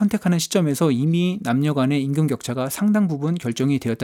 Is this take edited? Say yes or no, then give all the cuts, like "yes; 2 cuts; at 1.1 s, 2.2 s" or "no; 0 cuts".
no; 0 cuts